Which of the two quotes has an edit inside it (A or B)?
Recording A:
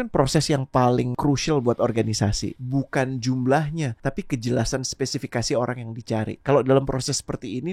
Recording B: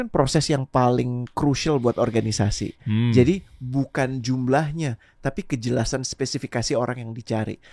A